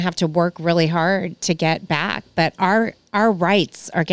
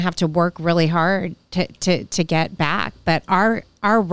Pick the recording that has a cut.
first; 1 cut; at 1.4 s

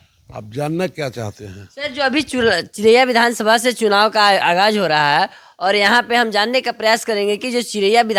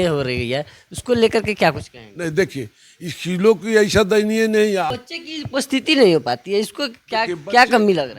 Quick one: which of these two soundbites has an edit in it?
second; 1 cut; at 4.9 s

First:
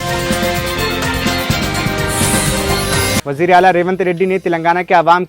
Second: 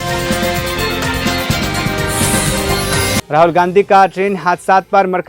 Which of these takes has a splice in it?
first; 1 cut; at 3.2 s

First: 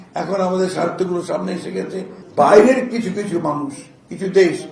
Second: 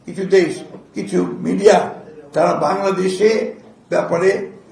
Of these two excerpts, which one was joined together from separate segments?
first; 1 cut; at 2.2 s

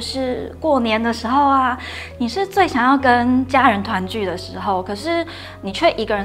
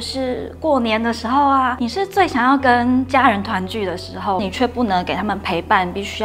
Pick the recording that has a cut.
second; 2 cuts; at 1.8 s, 4.4 s

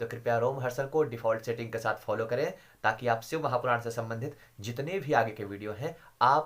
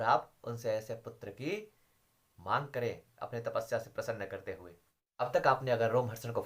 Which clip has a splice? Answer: second; 1 cut; at 5.3 s

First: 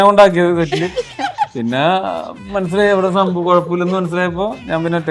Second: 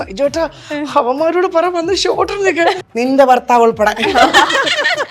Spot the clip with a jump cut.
second; 1 cut; at 2.8 s

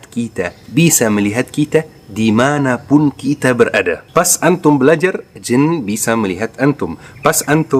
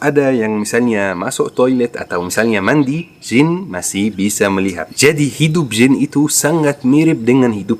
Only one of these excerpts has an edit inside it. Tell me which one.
second; 1 cut; at 4.9 s

